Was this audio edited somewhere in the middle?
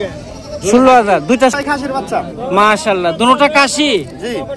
yes; 1 cut; at 1.5 s

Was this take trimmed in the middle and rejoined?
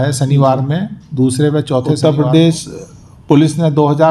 yes; 1 cut; at 2.0 s

